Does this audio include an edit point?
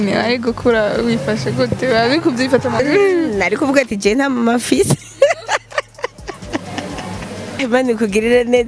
yes; 2 cuts; at 2.8 s, 7.6 s

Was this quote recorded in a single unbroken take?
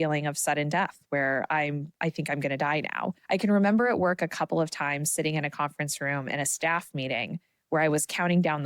no; 1 cut; at 3.2 s

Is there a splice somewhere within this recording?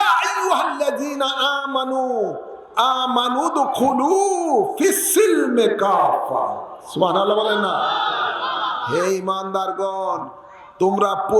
no; 0 cuts

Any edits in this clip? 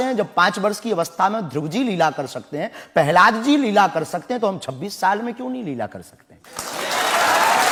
no; 0 cuts

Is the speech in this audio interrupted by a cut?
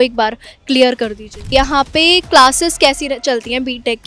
yes; 1 cut; at 1.5 s

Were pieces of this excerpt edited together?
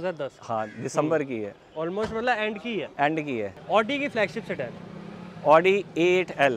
yes; 1 cut; at 3.5 s

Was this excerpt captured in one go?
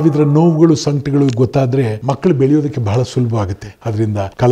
yes; 0 cuts

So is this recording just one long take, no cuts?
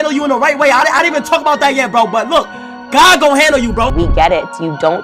no; 1 cut; at 3.9 s

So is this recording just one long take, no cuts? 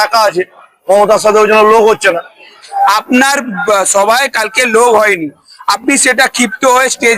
no; 1 cut; at 2.6 s

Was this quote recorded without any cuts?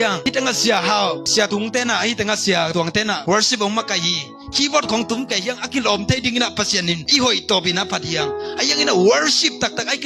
yes; 0 cuts

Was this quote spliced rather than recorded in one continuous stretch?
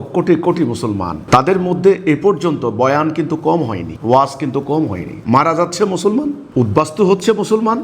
yes; 1 cut; at 5.1 s

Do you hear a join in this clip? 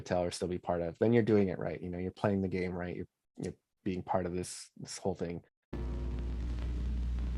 yes; 1 cut; at 5.6 s

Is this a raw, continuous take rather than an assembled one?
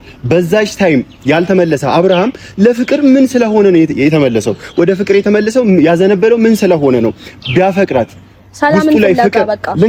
yes; 0 cuts

